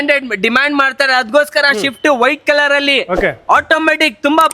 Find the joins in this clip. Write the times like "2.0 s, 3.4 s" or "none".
none

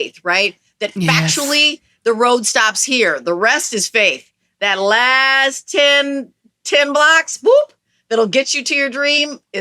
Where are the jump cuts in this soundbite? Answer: none

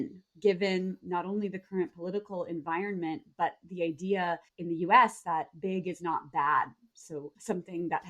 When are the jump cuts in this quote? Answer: none

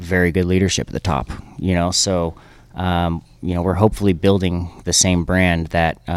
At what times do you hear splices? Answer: none

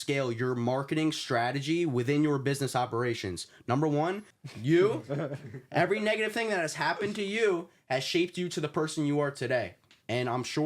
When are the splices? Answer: 4.3 s

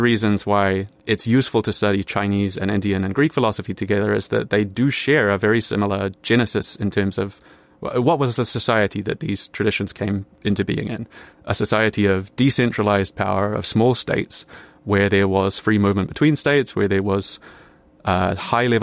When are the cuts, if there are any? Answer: 0.9 s

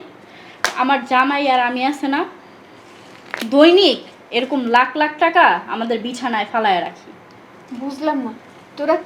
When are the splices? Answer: none

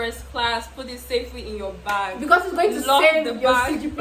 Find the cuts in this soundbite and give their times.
none

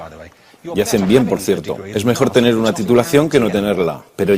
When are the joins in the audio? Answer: 1.1 s

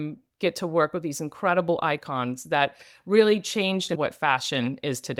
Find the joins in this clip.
none

